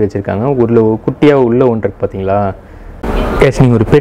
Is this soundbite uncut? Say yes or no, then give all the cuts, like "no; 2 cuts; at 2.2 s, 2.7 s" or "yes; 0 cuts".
yes; 0 cuts